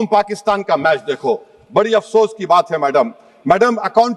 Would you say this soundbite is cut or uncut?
uncut